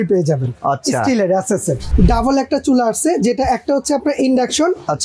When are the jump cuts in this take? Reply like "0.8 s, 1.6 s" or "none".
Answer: 1.9 s